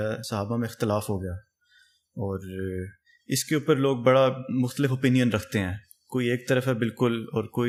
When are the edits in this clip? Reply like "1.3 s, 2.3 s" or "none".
none